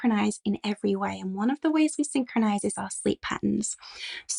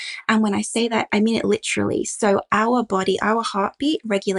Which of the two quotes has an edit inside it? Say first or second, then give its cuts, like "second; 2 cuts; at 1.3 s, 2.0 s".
second; 1 cut; at 1.1 s